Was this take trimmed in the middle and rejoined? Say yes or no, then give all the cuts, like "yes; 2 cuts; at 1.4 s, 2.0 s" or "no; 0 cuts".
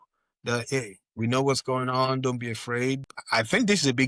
yes; 1 cut; at 3.1 s